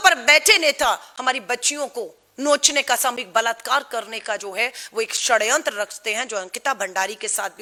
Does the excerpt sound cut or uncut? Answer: uncut